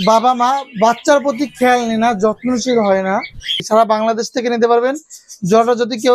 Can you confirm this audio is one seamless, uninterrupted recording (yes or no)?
no